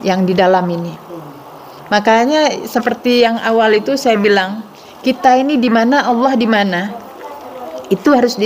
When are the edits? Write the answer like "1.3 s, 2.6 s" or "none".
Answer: none